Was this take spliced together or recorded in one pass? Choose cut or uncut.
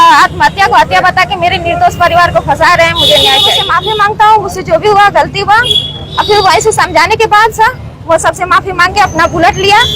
cut